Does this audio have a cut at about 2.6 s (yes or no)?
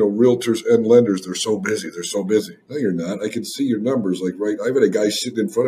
yes